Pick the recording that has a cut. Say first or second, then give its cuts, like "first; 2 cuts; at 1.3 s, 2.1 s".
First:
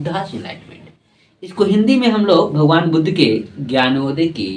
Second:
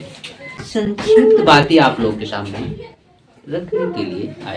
second; 1 cut; at 0.9 s